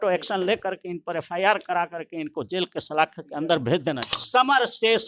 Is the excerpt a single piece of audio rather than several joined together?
no; 1 cut; at 4.1 s

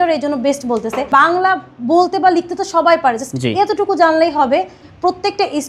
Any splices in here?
yes; 2 cuts; at 1.0 s, 4.8 s

